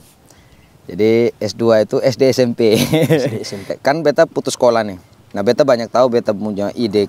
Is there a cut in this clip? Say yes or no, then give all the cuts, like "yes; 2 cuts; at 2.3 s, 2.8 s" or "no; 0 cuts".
yes; 1 cut; at 3.7 s